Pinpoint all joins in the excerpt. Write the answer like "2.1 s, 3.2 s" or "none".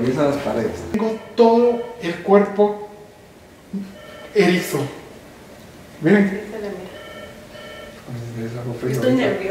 1.0 s